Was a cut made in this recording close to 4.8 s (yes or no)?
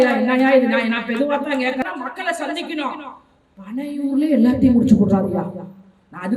no